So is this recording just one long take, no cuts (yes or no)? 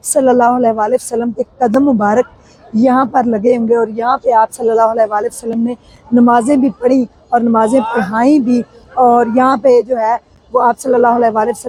yes